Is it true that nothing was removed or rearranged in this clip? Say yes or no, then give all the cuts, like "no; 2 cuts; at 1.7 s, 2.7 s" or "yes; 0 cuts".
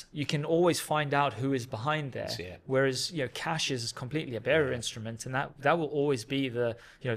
yes; 0 cuts